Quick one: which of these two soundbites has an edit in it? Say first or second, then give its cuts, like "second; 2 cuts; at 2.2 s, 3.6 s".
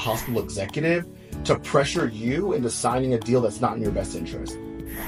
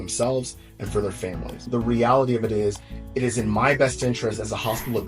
second; 1 cut; at 1.5 s